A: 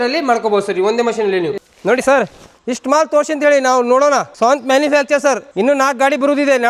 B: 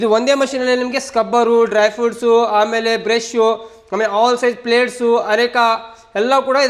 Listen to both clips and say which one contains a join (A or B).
A